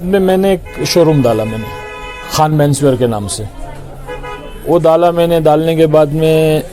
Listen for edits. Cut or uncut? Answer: uncut